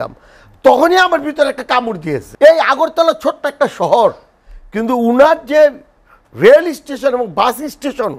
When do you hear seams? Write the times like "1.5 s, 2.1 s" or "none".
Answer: 2.3 s